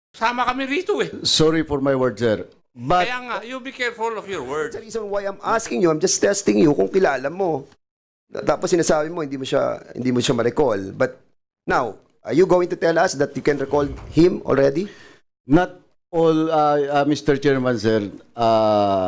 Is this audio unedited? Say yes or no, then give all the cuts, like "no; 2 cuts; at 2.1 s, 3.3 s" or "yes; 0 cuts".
no; 1 cut; at 4.9 s